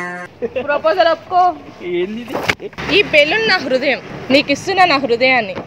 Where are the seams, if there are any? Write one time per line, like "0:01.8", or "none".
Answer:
0:02.7
0:04.1